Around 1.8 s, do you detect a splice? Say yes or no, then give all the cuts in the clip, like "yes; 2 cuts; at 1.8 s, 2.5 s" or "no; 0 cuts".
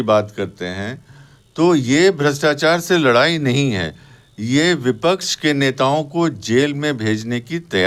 no; 0 cuts